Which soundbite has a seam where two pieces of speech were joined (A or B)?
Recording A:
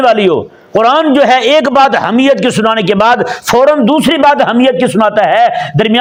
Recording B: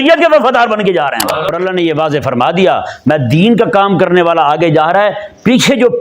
B